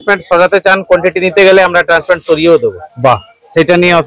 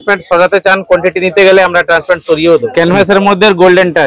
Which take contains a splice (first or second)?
second